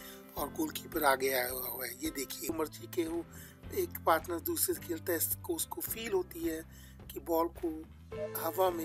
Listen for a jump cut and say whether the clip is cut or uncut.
cut